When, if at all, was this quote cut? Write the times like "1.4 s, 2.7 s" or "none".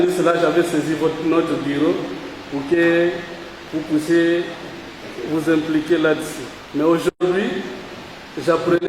none